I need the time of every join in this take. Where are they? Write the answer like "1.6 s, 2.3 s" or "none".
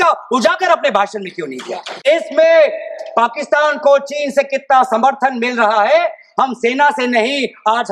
2.1 s